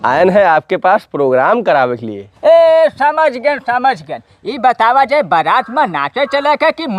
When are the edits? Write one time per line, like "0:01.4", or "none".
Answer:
0:02.2